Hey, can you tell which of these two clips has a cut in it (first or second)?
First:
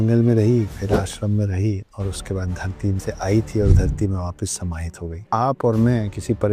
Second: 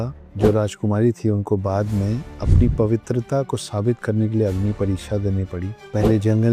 first